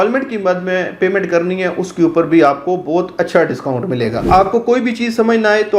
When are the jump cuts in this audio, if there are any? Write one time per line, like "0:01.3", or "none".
0:04.2